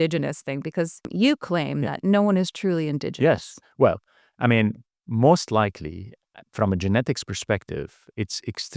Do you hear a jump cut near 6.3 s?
no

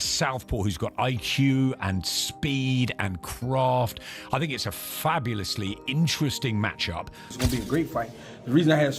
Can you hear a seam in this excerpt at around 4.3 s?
no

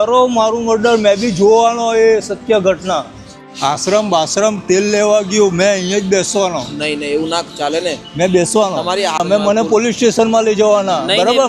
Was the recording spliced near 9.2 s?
yes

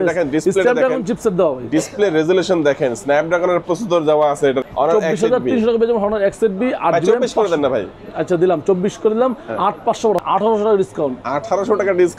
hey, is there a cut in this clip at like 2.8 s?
no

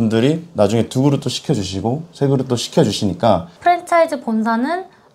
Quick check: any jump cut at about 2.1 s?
no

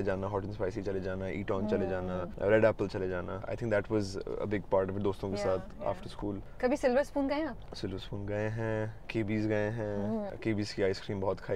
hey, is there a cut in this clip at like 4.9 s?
no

